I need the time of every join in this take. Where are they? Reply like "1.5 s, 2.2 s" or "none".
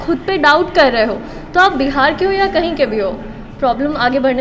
none

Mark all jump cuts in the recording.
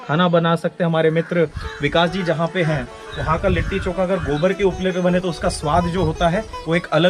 none

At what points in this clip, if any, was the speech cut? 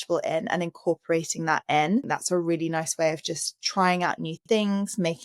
2.1 s

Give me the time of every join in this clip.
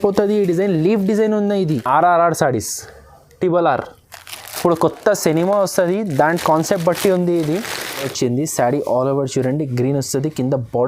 1.8 s, 8.1 s

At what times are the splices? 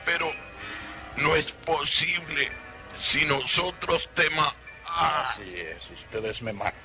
4.7 s

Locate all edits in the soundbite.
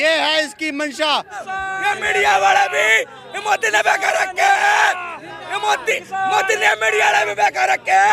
1.5 s

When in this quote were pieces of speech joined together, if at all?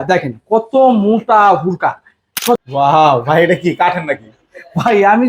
2.6 s

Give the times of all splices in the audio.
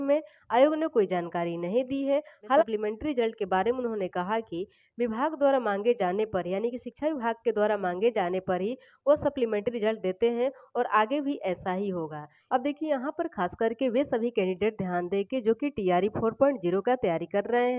2.7 s, 12.3 s

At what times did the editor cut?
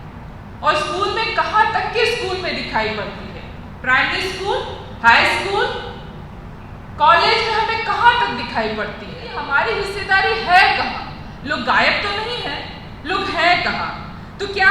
9.3 s

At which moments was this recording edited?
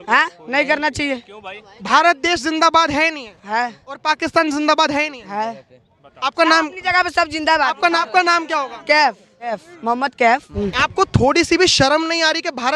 8.0 s, 9.6 s, 10.5 s

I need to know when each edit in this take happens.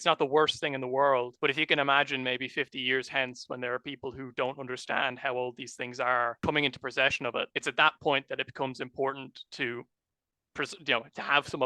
1.3 s, 6.4 s, 7.5 s

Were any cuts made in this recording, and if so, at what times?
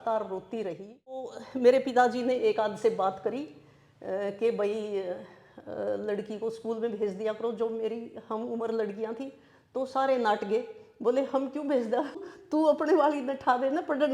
1.4 s, 12.2 s

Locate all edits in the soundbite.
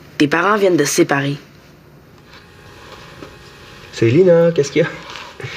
2.3 s

